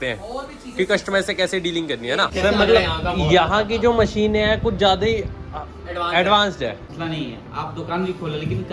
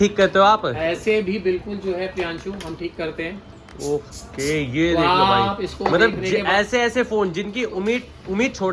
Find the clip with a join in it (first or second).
first